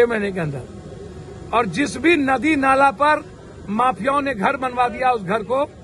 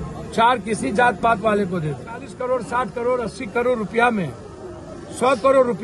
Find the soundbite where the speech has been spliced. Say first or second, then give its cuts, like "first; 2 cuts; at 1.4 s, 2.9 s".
second; 1 cut; at 2.3 s